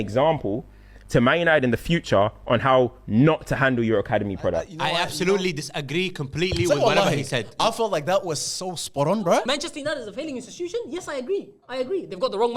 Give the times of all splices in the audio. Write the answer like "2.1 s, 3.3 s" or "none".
4.7 s, 9.4 s